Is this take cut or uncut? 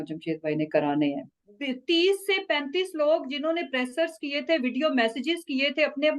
cut